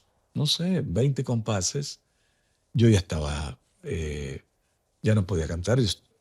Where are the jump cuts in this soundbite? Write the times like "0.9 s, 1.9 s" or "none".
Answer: none